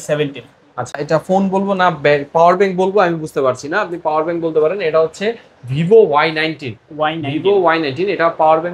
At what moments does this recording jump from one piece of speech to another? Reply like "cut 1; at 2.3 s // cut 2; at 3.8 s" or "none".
cut 1; at 0.9 s